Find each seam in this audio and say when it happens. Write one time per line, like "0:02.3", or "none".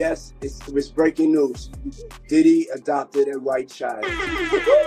none